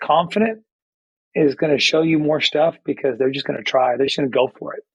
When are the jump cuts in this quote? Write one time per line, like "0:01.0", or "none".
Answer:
none